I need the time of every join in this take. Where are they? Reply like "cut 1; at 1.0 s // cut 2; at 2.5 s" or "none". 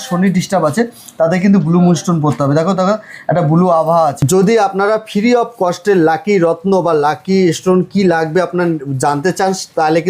cut 1; at 4.2 s